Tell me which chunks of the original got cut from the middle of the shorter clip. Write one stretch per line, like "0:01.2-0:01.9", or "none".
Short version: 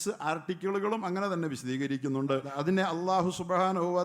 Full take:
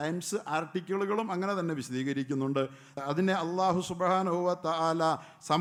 0:02.8-0:03.0